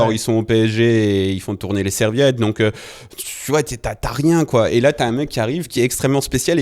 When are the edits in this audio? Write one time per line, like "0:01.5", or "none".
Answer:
0:05.7